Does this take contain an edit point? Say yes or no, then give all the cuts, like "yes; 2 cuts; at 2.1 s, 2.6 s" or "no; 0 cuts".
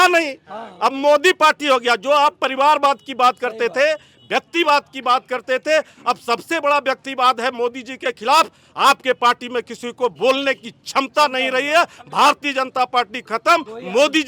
no; 0 cuts